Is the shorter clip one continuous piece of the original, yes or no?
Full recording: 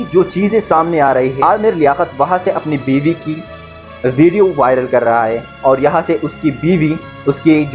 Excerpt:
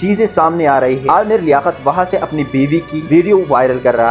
no